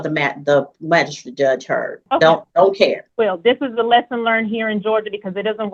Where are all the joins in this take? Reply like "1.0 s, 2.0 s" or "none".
2.0 s, 3.0 s